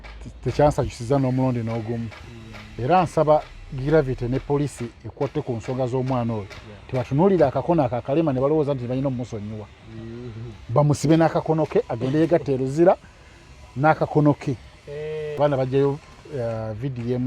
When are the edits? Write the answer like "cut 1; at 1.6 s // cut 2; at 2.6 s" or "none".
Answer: cut 1; at 15.3 s